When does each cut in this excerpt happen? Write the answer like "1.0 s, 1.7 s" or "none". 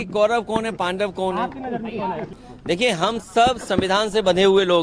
2.4 s